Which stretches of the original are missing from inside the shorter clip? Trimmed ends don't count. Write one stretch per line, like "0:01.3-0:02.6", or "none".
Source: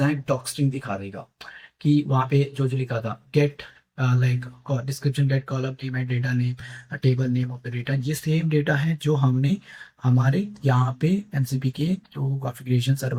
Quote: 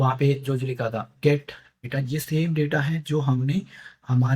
0:03.8-0:07.6